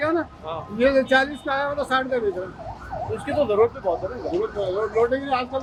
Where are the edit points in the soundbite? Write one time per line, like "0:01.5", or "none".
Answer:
none